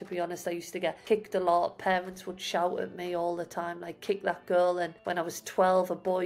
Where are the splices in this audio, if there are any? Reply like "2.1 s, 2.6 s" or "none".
1.0 s, 5.0 s